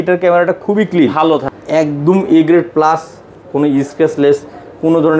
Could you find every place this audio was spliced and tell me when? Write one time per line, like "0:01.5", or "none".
0:01.4